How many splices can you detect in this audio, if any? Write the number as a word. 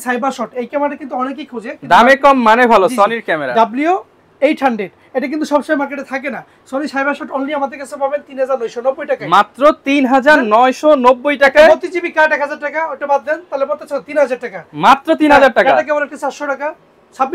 zero